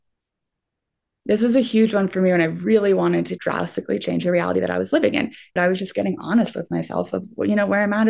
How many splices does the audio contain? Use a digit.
1